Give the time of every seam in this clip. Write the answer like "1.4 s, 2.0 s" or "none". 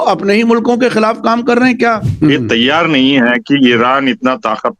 2.1 s